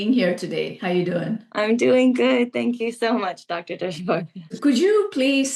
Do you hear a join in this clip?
yes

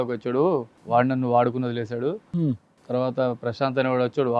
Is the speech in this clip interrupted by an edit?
no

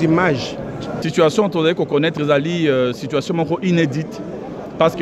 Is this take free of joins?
no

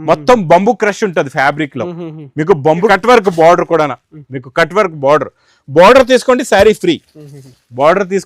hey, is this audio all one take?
no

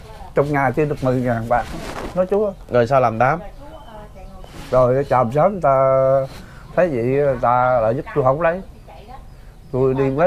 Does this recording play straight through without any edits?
yes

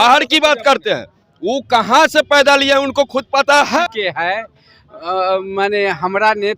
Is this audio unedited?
no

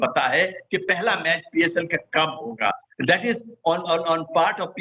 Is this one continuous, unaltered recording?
yes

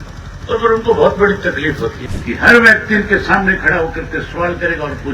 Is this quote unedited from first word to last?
no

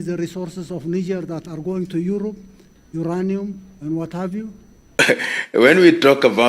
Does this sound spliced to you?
yes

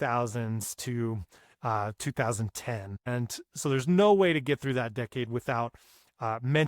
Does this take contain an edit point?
yes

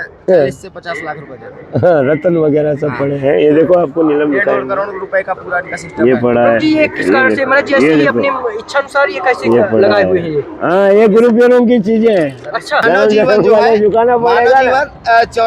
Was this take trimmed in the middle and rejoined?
yes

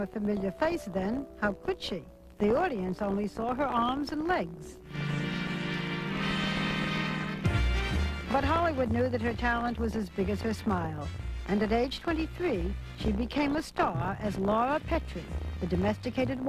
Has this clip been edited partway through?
no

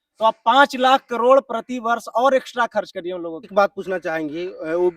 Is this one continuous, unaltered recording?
no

